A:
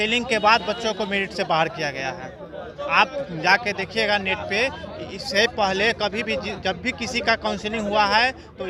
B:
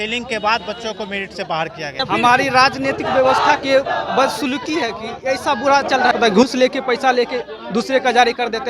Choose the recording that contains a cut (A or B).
B